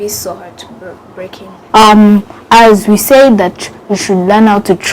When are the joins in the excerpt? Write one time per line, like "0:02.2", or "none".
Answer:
0:01.6